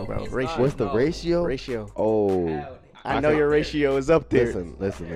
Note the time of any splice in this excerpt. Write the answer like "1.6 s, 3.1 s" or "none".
none